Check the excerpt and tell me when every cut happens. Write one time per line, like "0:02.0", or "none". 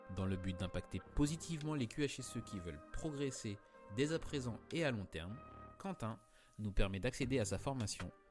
0:01.1